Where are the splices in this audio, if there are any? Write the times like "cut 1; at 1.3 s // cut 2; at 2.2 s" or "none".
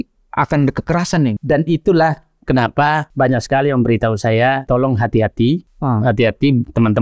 cut 1; at 1.4 s // cut 2; at 3.1 s // cut 3; at 4.6 s // cut 4; at 5.7 s